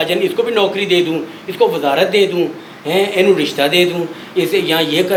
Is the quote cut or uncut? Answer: uncut